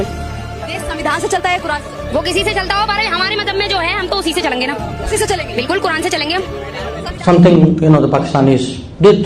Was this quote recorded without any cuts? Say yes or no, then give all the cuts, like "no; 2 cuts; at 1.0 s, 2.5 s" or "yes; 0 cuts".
no; 1 cut; at 7.1 s